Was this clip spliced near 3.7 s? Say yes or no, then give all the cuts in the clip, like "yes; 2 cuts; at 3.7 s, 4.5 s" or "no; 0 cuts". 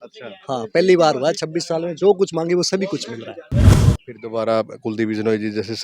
yes; 1 cut; at 3.7 s